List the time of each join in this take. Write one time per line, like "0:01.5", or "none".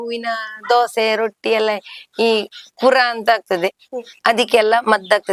none

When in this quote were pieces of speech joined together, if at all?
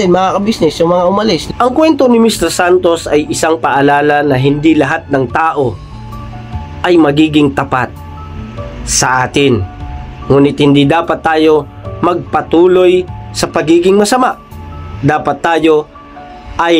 0:01.4

